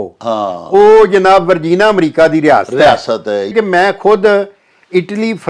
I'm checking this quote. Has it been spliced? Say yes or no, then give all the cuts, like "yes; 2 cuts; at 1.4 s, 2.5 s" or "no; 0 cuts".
yes; 1 cut; at 3.5 s